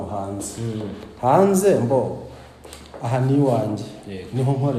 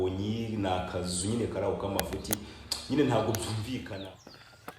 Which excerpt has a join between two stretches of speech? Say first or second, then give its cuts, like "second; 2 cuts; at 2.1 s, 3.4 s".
second; 1 cut; at 3.9 s